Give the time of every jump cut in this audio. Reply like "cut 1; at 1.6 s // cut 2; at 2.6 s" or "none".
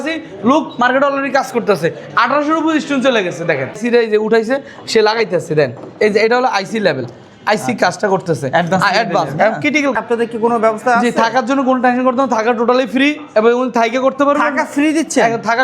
cut 1; at 3.8 s // cut 2; at 10.0 s

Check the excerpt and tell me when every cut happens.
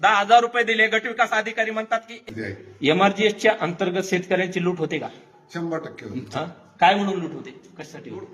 cut 1; at 2.2 s

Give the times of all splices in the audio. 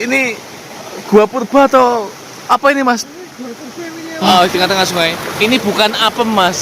cut 1; at 4.3 s

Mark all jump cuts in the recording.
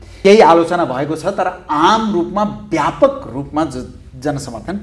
none

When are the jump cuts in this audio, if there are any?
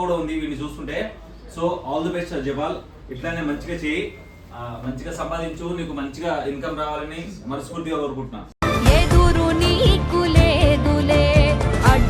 none

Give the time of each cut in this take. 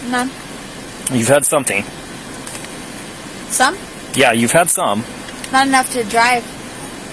none

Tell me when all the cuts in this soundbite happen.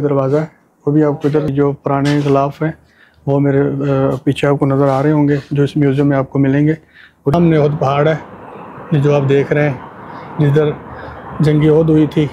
cut 1; at 1.5 s // cut 2; at 7.3 s

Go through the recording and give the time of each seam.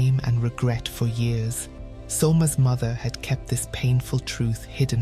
none

